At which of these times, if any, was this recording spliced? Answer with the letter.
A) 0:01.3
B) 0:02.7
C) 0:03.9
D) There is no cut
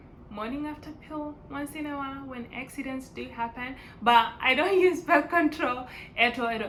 D